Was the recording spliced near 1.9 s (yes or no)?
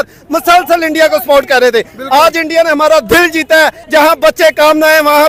no